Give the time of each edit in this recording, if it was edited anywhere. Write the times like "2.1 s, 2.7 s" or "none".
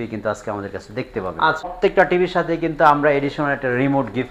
1.7 s